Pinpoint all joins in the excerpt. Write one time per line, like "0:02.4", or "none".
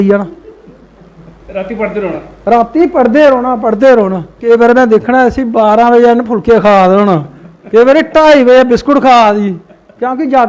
0:04.4